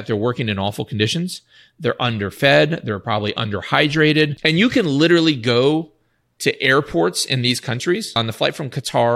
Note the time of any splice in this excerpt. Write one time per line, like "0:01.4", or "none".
0:04.4
0:08.2